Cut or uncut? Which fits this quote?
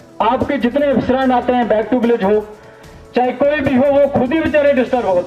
uncut